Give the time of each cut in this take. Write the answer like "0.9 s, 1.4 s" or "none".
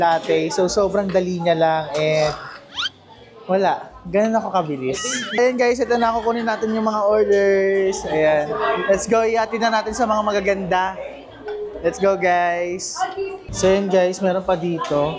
5.4 s, 13.4 s